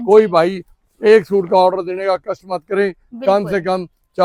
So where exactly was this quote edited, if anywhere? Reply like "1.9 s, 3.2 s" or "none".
none